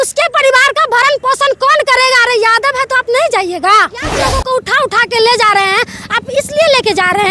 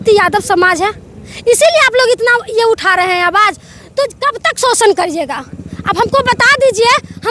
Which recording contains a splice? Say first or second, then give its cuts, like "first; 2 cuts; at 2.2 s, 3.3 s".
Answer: first; 1 cut; at 4.1 s